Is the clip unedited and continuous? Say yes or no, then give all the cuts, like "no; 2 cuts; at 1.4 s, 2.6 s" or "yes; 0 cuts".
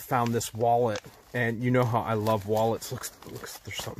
yes; 0 cuts